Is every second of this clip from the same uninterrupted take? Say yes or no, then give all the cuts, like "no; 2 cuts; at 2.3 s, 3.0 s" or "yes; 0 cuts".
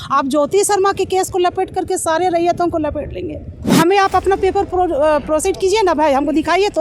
no; 1 cut; at 3.6 s